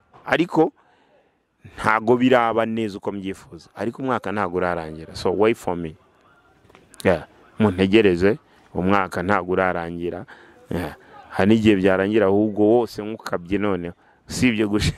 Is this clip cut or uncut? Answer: uncut